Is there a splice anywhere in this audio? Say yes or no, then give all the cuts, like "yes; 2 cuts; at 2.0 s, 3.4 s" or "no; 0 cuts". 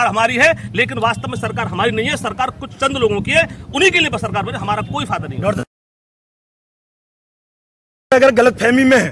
no; 0 cuts